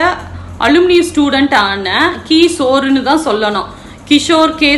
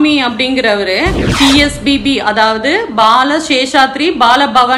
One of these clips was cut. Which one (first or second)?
second